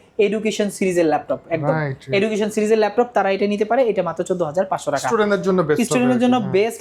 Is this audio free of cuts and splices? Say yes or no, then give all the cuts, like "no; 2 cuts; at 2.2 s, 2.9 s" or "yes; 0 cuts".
yes; 0 cuts